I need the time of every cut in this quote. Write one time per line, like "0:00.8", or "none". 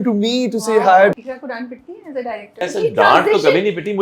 0:01.2
0:02.6